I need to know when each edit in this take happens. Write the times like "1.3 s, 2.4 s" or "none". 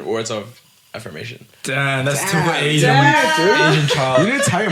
none